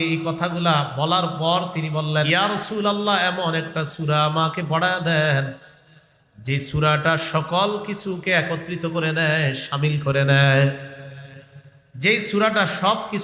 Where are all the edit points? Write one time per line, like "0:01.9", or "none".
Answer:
0:02.3